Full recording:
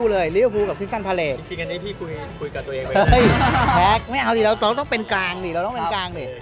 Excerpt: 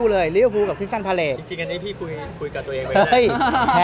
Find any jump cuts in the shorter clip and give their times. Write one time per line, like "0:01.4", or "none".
none